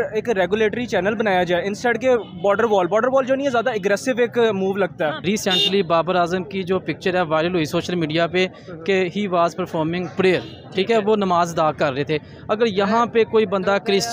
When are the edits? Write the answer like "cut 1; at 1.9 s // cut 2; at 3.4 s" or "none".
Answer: cut 1; at 5.2 s